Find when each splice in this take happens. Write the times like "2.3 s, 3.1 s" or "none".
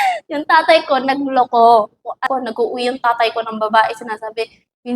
2.2 s